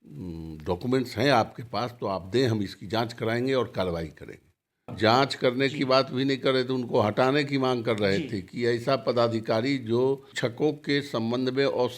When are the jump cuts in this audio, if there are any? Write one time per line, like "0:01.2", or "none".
0:04.8
0:10.3